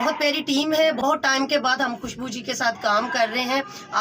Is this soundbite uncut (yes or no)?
no